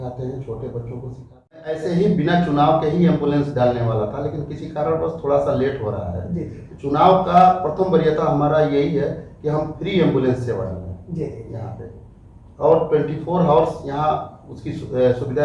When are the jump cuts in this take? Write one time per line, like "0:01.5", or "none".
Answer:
0:01.8